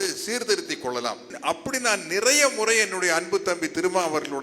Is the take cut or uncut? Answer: cut